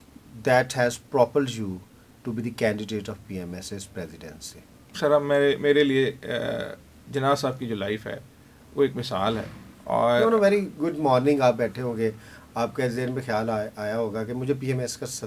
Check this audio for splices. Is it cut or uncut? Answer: uncut